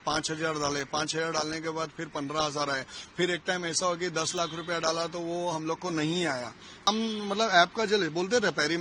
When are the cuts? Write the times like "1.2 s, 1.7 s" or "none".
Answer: 6.9 s